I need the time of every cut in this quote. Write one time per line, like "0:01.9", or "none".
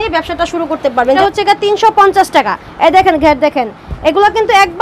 0:01.2